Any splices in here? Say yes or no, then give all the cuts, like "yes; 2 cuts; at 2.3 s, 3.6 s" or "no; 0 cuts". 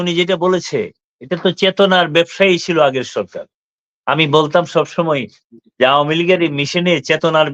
no; 0 cuts